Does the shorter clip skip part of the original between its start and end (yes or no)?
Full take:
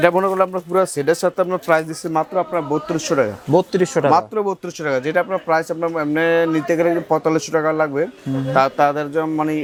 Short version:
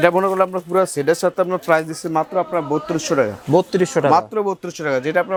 no